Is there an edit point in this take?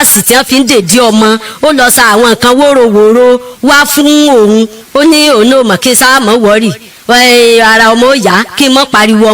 yes; 1 cut; at 4.8 s

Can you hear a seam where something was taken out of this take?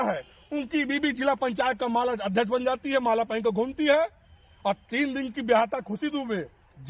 no; 0 cuts

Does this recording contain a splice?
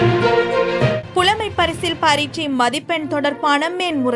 yes; 1 cut; at 1.0 s

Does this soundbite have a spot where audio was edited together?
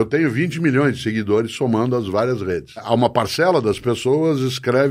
yes; 1 cut; at 2.8 s

